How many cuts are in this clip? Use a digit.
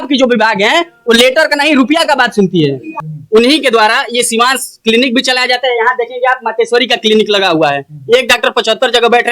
1